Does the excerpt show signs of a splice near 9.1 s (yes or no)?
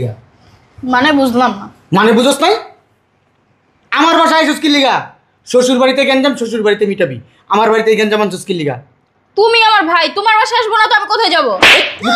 no